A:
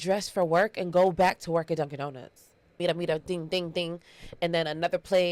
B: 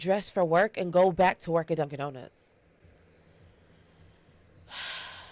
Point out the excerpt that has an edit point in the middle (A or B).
A